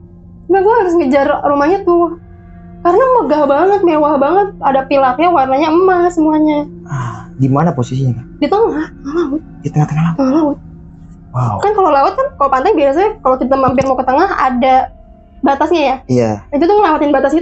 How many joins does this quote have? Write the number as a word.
zero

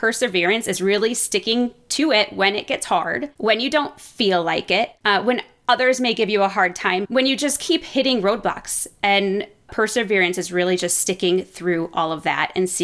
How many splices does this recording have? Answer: four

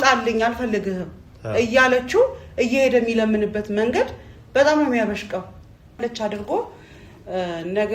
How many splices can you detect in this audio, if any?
one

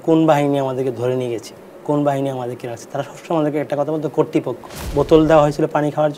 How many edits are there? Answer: one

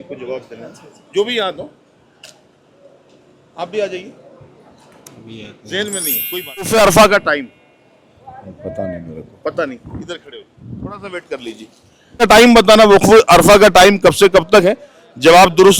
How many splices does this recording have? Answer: two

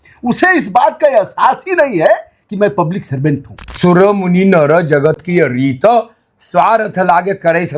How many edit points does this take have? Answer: one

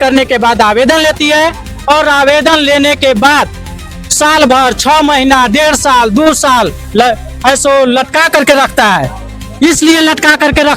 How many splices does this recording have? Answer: zero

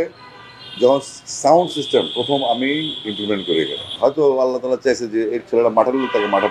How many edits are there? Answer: one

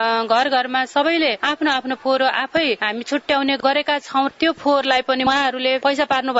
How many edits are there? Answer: one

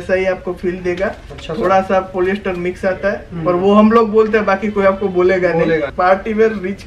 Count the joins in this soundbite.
one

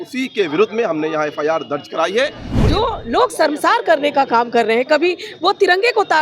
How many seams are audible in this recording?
one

